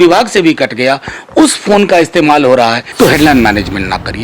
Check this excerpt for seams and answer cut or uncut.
cut